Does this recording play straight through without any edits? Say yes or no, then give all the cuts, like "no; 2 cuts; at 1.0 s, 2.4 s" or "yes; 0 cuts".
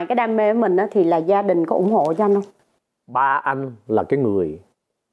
yes; 0 cuts